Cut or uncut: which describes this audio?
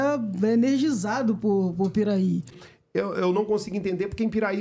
cut